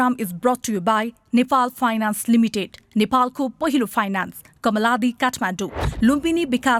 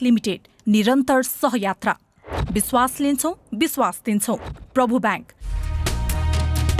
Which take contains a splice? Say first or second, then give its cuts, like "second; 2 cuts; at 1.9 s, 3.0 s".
second; 1 cut; at 5.7 s